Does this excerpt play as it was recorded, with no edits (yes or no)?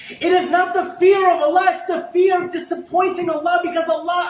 yes